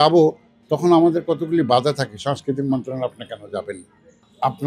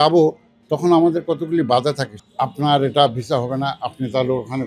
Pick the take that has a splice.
second; 1 cut; at 2.1 s

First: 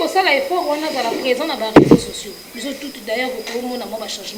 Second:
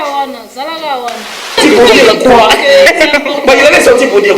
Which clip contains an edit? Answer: second; 1 cut; at 1.6 s

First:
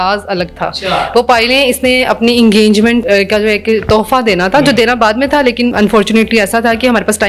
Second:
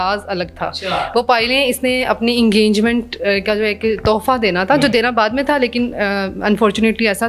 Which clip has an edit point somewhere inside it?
first; 2 cuts; at 3.0 s, 5.7 s

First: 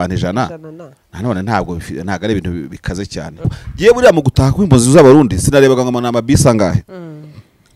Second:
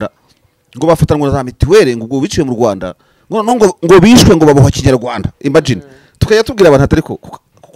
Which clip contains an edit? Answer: first; 1 cut; at 3.6 s

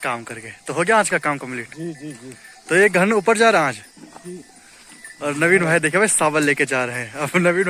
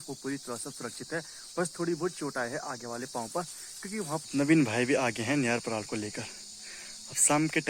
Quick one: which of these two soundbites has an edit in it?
second; 1 cut; at 4.2 s

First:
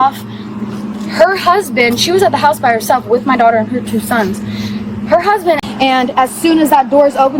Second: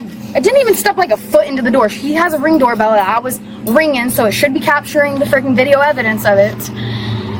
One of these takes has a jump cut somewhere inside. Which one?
first; 1 cut; at 5.7 s

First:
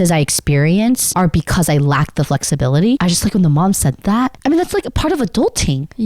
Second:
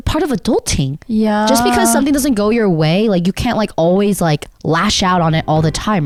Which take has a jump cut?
first; 2 cuts; at 1.1 s, 3.0 s

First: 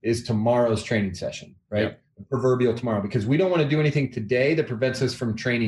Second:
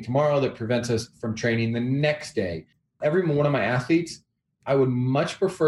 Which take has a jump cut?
second; 1 cut; at 2.9 s

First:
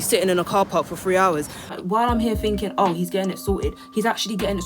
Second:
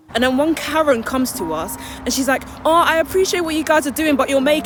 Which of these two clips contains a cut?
first; 1 cut; at 1.6 s

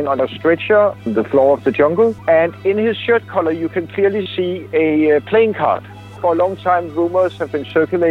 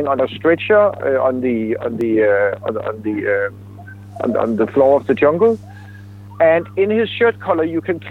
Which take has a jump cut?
first; 3 cuts; at 1.0 s, 2.2 s, 6.1 s

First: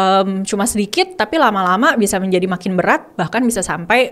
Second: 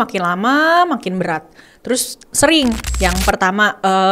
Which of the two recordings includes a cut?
second; 1 cut; at 2.8 s

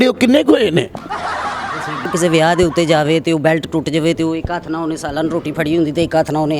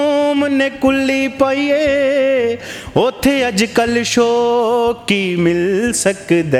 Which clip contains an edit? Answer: first; 1 cut; at 2.1 s

